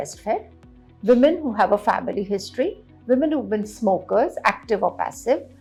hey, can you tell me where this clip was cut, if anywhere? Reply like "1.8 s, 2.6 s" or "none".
none

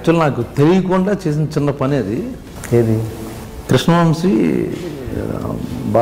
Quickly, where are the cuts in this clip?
2.5 s, 3.2 s

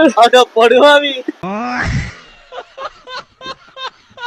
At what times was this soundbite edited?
none

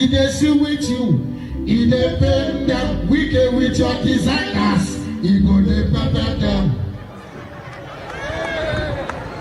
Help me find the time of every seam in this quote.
none

